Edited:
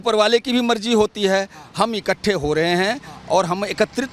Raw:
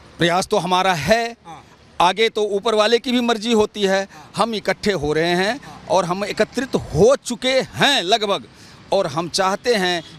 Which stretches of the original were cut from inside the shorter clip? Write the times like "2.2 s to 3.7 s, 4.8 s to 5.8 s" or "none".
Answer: none